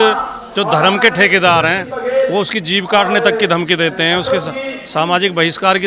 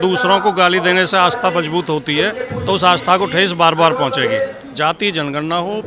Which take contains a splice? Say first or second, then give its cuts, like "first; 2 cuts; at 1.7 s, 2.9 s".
second; 1 cut; at 4.6 s